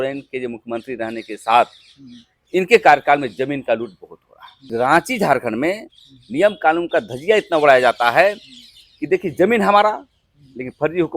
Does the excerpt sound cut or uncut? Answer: cut